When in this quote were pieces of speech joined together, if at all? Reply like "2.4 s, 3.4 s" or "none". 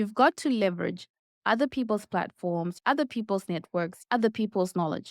2.7 s, 4.0 s